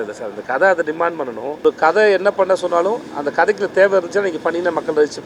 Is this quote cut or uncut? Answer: cut